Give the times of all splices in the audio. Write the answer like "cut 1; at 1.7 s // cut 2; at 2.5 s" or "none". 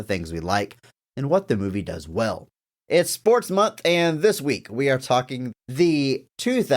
cut 1; at 2.5 s // cut 2; at 5.5 s